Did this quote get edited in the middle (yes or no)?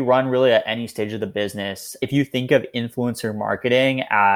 yes